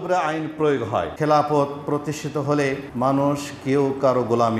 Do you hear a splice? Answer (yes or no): yes